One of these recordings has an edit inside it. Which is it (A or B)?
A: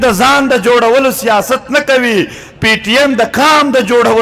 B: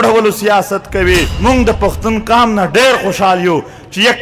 B